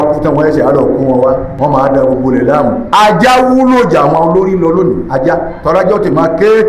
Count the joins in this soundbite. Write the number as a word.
one